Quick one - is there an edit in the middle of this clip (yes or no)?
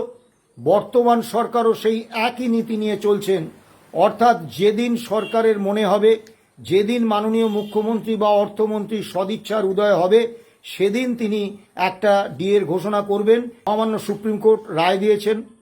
yes